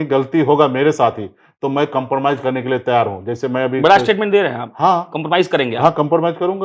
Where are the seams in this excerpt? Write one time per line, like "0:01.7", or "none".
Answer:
none

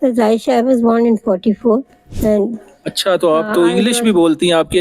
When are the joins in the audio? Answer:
none

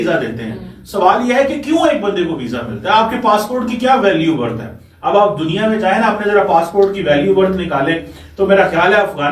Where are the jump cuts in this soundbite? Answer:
none

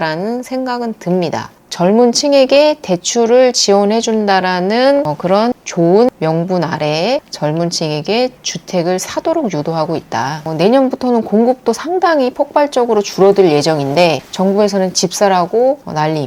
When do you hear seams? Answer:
0:01.6
0:10.5

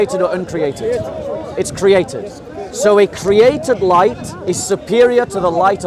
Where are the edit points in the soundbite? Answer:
none

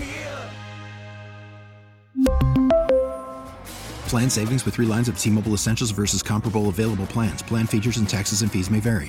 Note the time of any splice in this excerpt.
none

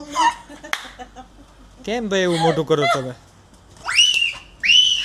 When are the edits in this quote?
0:03.7

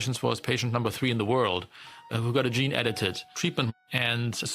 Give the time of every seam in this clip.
0:02.1
0:03.4

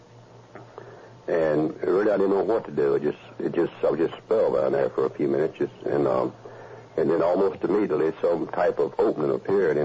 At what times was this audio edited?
none

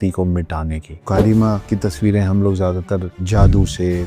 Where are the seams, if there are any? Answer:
0:00.9
0:01.6

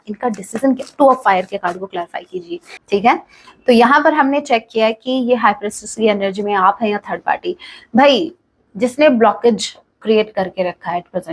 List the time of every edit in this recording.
0:02.7

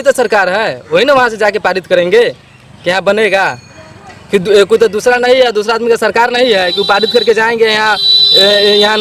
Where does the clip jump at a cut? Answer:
none

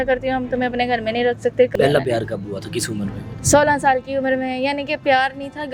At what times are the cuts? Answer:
0:01.7
0:03.3

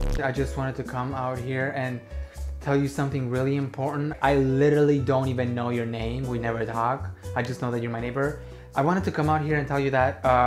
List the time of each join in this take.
0:04.1

